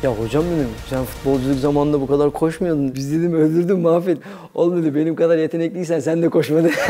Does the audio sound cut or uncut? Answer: cut